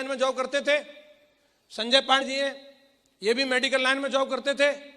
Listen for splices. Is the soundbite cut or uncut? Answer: cut